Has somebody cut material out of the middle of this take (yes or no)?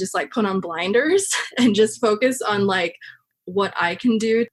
no